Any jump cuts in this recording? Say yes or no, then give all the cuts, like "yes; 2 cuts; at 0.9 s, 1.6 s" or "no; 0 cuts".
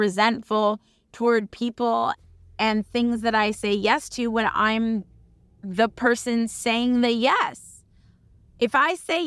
yes; 1 cut; at 2.2 s